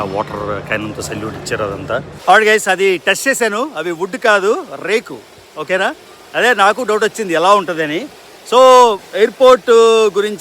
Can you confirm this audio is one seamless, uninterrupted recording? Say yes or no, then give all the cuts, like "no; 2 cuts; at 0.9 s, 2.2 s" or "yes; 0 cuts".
no; 1 cut; at 2.1 s